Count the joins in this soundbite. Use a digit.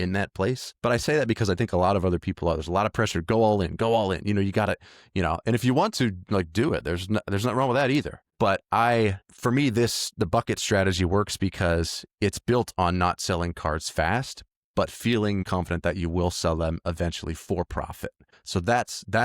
1